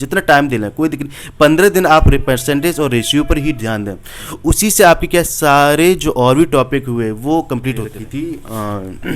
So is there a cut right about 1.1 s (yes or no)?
no